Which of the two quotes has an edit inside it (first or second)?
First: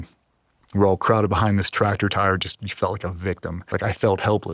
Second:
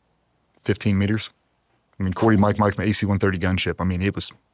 first